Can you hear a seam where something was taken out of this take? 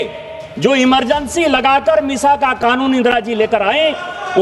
no; 0 cuts

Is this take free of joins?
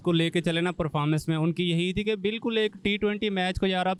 yes; 0 cuts

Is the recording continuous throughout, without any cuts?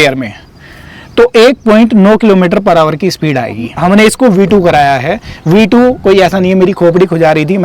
no; 1 cut; at 3.7 s

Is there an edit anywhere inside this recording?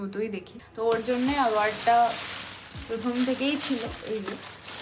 no; 0 cuts

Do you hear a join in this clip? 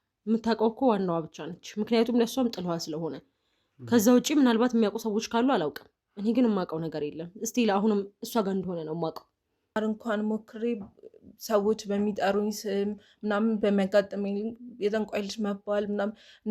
yes; 1 cut; at 9.8 s

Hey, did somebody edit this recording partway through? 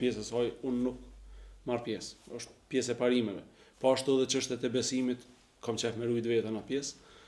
no; 0 cuts

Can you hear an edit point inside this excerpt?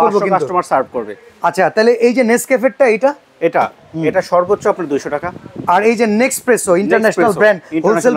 no; 0 cuts

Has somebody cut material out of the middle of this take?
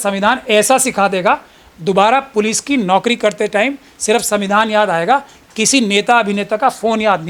no; 0 cuts

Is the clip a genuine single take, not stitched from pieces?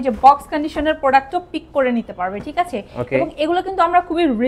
yes; 0 cuts

